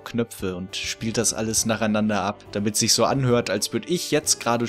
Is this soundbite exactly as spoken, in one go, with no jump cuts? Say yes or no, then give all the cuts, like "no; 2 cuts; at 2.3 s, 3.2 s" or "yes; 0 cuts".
no; 1 cut; at 2.4 s